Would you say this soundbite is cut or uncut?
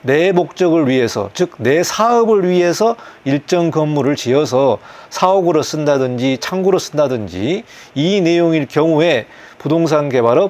uncut